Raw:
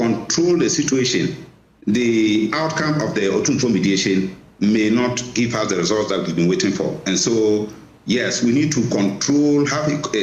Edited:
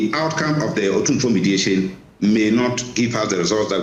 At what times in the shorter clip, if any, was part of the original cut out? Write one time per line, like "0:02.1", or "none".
none